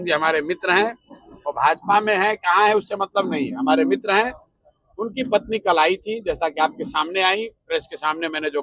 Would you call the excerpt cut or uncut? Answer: uncut